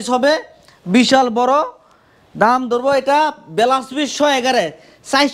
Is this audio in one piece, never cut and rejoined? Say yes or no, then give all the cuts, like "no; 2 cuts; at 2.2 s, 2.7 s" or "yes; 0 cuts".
yes; 0 cuts